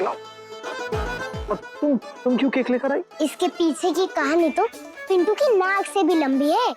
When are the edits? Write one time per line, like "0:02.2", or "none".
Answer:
0:01.4